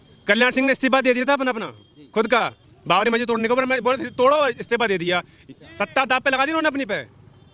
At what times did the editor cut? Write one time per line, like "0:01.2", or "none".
0:02.7